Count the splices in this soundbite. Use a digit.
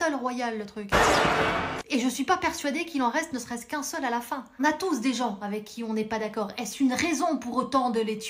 1